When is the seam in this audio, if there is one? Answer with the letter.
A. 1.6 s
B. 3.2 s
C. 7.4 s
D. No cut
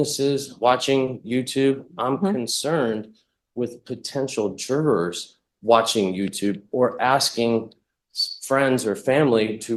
D